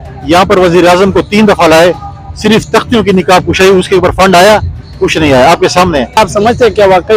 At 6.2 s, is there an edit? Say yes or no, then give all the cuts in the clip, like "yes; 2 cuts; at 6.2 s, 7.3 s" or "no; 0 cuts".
yes; 1 cut; at 6.2 s